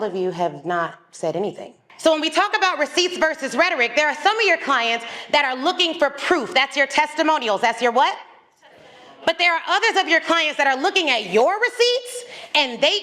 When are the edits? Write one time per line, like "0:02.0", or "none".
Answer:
0:01.9